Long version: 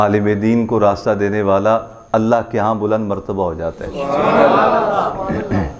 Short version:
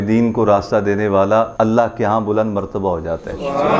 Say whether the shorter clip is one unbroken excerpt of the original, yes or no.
no